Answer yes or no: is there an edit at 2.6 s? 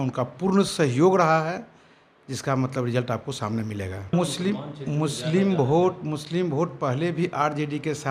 no